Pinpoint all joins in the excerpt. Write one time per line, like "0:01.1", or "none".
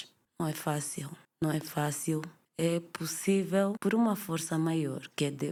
none